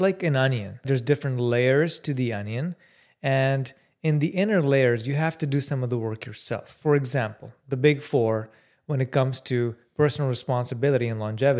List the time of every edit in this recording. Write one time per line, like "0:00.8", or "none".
none